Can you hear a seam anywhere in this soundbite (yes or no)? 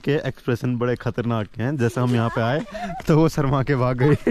no